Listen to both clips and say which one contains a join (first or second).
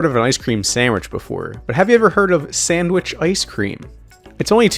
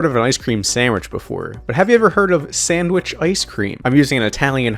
second